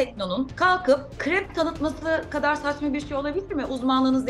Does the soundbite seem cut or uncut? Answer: uncut